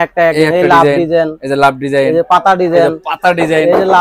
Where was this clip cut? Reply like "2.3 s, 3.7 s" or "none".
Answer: none